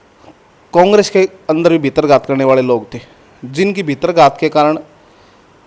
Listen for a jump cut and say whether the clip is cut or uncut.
uncut